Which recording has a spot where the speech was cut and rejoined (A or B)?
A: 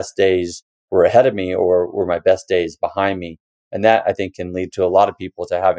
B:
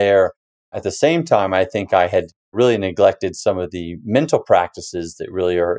B